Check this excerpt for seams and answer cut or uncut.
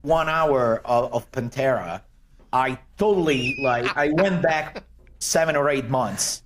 uncut